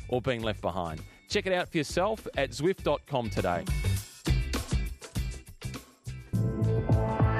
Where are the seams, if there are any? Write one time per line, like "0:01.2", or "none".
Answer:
0:06.3